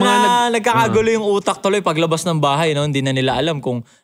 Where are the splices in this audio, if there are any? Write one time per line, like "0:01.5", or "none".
none